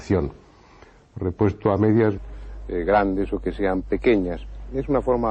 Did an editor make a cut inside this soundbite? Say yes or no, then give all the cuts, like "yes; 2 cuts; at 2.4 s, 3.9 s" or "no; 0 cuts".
no; 0 cuts